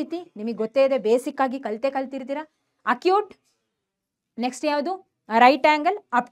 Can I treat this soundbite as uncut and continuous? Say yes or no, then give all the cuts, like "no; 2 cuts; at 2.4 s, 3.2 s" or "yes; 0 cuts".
yes; 0 cuts